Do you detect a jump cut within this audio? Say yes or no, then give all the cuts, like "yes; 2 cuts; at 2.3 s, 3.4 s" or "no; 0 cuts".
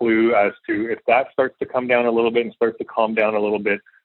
no; 0 cuts